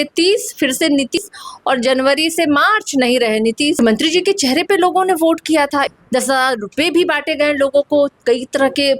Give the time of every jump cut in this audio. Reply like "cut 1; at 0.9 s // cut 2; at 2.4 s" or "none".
cut 1; at 1.2 s // cut 2; at 3.8 s // cut 3; at 5.9 s